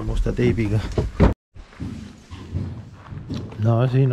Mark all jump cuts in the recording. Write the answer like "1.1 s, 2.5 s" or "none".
1.3 s